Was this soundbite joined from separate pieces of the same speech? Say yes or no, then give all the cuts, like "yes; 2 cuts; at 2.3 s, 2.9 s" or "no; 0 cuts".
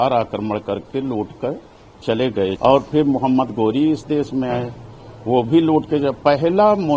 yes; 1 cut; at 2.6 s